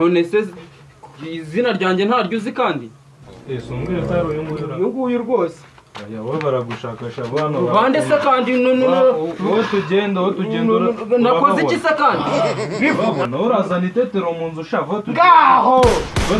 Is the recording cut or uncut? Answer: uncut